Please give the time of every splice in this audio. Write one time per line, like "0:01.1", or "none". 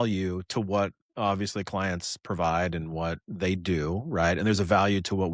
none